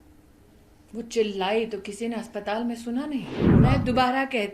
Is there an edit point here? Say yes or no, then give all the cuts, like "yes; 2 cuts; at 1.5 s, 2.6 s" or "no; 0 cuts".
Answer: yes; 1 cut; at 3.4 s